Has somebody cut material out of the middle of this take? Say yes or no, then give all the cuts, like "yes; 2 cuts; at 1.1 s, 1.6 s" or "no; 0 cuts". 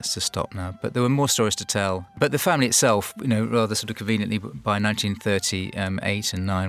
yes; 1 cut; at 2.2 s